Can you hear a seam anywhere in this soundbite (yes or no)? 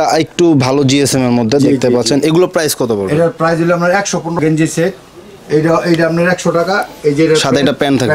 yes